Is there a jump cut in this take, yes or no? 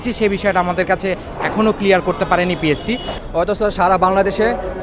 yes